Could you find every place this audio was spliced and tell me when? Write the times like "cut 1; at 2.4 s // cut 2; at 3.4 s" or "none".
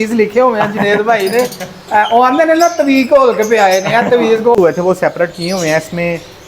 cut 1; at 4.6 s